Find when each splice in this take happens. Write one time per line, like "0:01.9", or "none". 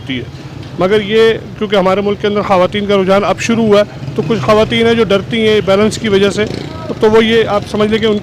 none